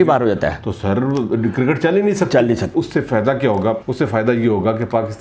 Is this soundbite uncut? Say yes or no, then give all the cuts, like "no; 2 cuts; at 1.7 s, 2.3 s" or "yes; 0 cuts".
no; 2 cuts; at 2.7 s, 3.9 s